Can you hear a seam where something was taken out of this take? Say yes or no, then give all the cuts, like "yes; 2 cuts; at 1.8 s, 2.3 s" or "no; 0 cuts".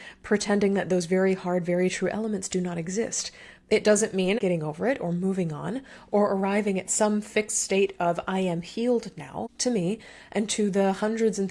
yes; 2 cuts; at 4.4 s, 9.5 s